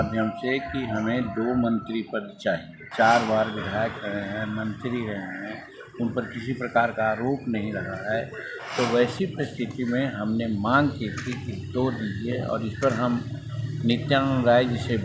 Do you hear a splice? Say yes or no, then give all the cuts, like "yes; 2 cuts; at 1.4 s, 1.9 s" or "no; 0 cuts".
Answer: yes; 1 cut; at 2.8 s